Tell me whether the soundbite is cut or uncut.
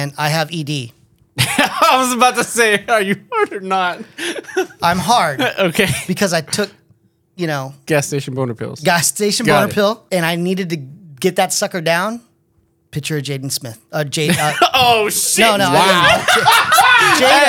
uncut